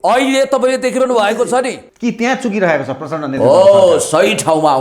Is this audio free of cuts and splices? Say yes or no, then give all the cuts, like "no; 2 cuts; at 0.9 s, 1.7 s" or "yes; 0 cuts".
no; 1 cut; at 1.8 s